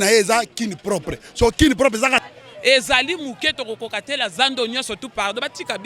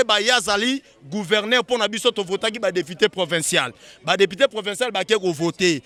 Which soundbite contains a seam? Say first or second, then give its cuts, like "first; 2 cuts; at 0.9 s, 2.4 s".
first; 1 cut; at 2.2 s